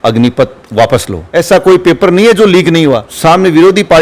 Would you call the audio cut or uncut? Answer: cut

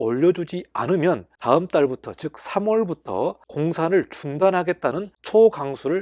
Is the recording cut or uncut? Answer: cut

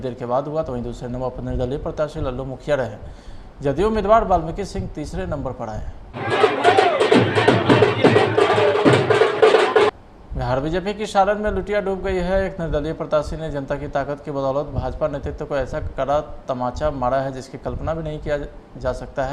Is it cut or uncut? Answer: cut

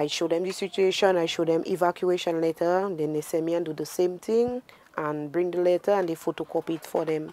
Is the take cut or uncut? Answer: uncut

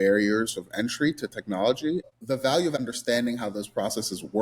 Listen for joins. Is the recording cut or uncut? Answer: cut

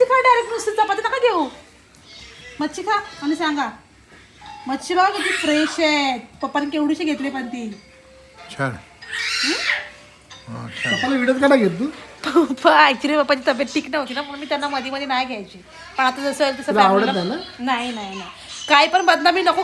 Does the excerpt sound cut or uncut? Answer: uncut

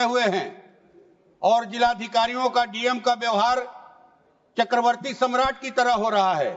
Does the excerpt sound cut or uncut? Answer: uncut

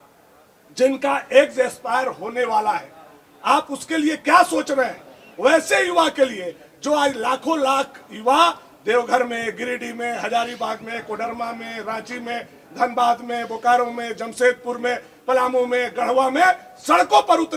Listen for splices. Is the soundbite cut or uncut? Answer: uncut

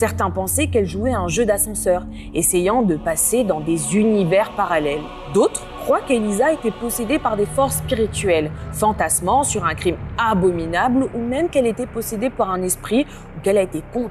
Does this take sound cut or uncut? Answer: cut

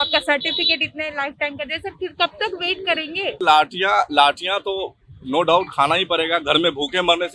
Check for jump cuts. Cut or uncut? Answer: cut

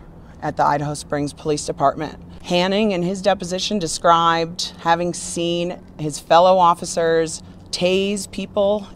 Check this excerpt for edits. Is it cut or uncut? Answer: uncut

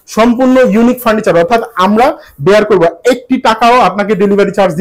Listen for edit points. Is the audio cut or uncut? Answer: uncut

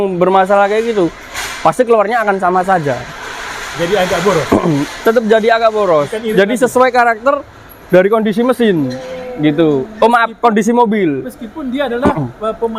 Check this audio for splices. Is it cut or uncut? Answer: uncut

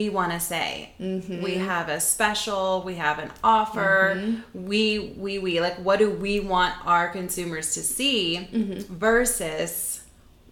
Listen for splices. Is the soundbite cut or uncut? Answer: uncut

